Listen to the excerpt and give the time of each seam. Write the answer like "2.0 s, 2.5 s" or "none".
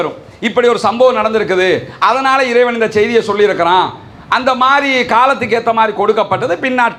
none